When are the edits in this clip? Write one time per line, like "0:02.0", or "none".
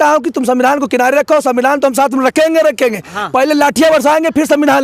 none